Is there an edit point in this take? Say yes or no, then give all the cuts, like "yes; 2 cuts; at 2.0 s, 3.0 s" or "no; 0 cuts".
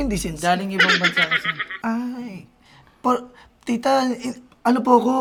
no; 0 cuts